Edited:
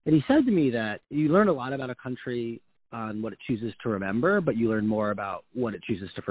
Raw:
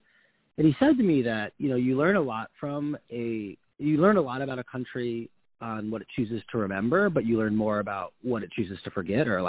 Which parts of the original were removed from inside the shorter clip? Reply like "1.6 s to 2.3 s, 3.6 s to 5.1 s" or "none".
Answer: 1.5 s to 3.6 s